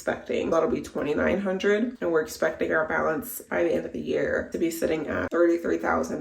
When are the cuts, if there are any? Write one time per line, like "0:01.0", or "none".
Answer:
0:05.3